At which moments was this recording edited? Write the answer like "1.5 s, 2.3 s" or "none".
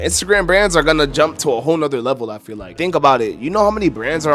none